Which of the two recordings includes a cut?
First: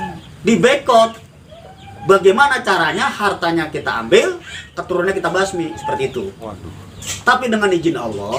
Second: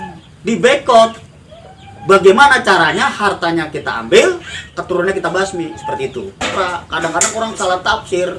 second; 1 cut; at 6.5 s

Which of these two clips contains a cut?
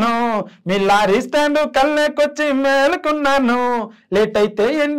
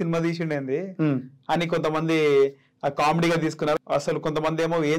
second; 1 cut; at 3.8 s

